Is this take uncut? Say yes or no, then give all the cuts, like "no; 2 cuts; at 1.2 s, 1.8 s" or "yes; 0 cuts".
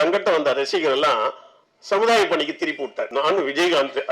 no; 1 cut; at 3.1 s